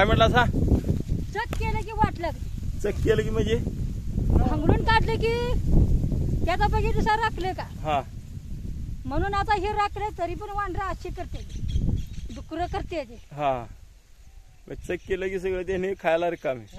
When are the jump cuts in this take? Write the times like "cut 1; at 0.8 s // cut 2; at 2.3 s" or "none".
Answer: none